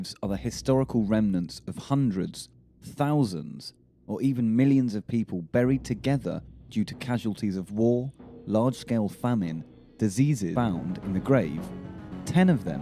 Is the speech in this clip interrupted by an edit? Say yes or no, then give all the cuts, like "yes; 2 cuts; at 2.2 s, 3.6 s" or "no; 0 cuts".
no; 0 cuts